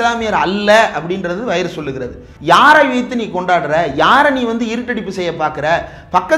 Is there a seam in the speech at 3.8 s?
no; 1 cut; at 2.3 s

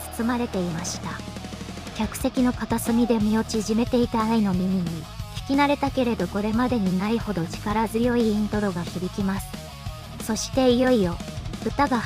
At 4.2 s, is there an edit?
no; 1 cut; at 10.1 s

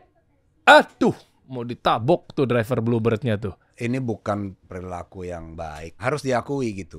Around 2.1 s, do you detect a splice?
no; 3 cuts; at 3.7 s, 4.7 s, 6.0 s

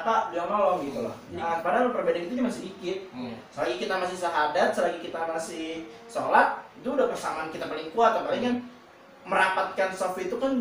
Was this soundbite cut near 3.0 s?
no; 1 cut; at 1.5 s

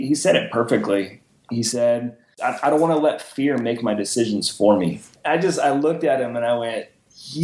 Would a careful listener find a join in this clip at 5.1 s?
yes; 2 cuts; at 2.3 s, 5.1 s

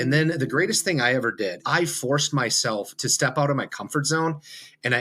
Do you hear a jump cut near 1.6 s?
yes; 1 cut; at 1.6 s

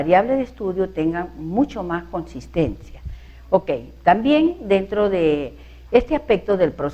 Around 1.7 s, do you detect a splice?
yes; 1 cut; at 1.7 s

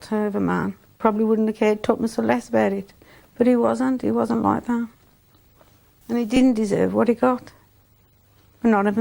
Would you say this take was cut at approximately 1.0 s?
yes; 1 cut; at 1.0 s

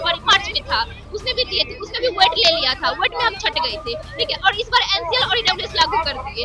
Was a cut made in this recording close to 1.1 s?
no; 0 cuts

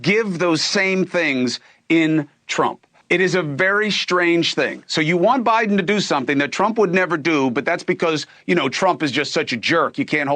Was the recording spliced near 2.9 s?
yes; 1 cut; at 2.9 s

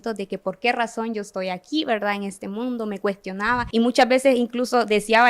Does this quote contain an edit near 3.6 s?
yes; 1 cut; at 3.6 s

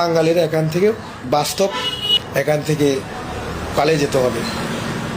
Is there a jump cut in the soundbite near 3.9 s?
no; 2 cuts; at 1.3 s, 2.1 s

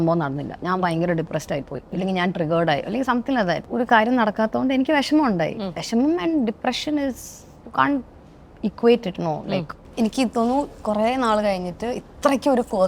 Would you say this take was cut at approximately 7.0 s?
no; 2 cuts; at 3.7 s, 9.8 s

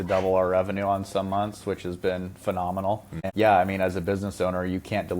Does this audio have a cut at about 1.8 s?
no; 1 cut; at 3.2 s

